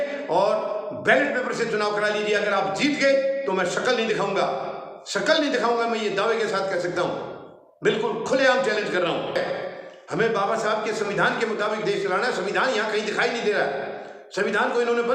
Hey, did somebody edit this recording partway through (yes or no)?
yes